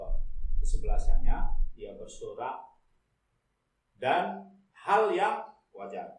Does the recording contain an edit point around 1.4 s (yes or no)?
no